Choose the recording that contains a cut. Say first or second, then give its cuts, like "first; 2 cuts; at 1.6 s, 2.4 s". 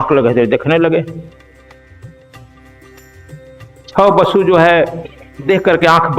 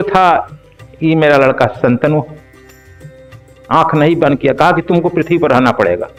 first; 2 cuts; at 1.3 s, 3.9 s